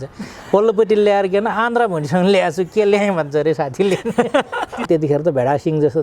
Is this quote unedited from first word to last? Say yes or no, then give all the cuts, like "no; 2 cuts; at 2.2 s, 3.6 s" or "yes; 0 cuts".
no; 1 cut; at 4.9 s